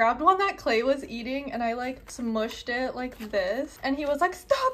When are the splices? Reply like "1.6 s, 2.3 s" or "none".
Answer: 2.1 s, 3.7 s